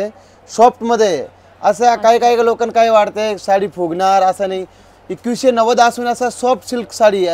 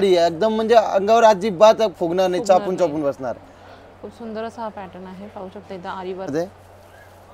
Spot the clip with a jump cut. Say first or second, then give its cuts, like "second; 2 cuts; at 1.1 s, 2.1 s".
second; 1 cut; at 6.3 s